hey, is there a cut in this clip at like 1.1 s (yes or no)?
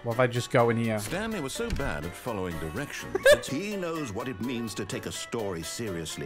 yes